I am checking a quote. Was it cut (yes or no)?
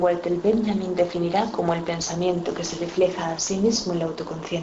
no